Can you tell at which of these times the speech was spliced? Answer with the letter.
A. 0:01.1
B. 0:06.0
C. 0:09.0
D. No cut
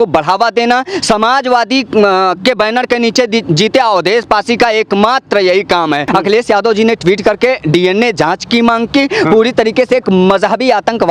B